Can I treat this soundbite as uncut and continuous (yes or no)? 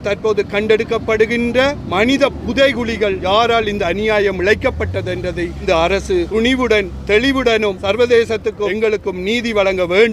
no